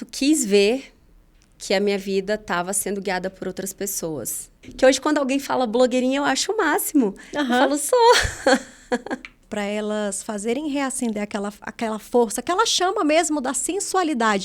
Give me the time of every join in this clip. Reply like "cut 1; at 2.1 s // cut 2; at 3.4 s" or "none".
cut 1; at 4.6 s // cut 2; at 9.4 s